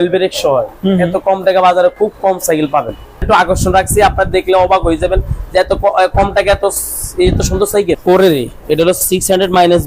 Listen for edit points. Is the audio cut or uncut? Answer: cut